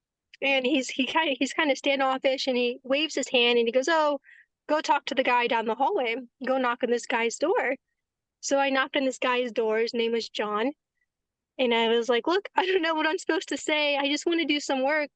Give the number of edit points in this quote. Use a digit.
1